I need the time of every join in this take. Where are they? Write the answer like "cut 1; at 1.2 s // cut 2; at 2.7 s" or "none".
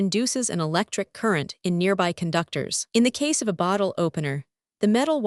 none

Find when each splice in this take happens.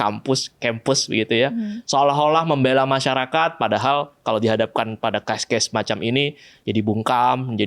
none

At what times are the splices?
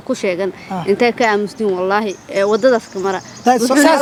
none

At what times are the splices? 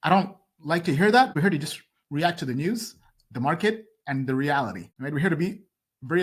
cut 1; at 1.3 s // cut 2; at 4.9 s

